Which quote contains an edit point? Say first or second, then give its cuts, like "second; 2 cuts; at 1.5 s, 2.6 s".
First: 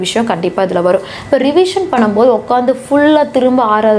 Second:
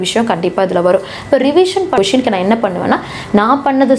second; 1 cut; at 1.9 s